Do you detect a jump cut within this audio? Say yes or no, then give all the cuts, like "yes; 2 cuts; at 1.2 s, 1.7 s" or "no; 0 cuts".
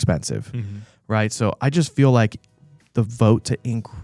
no; 0 cuts